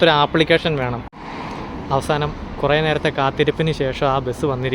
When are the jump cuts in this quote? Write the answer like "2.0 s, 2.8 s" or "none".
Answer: 1.0 s